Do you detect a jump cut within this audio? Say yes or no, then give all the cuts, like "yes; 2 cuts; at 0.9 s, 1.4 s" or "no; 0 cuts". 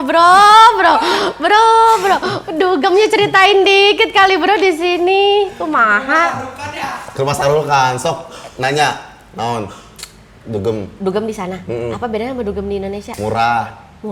no; 0 cuts